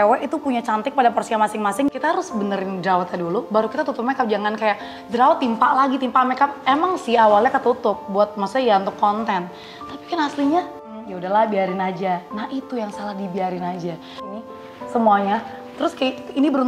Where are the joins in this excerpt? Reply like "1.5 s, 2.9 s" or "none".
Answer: 1.9 s, 10.8 s, 14.3 s